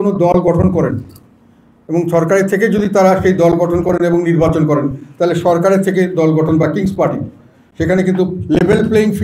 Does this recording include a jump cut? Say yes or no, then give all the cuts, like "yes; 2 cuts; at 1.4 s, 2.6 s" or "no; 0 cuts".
no; 0 cuts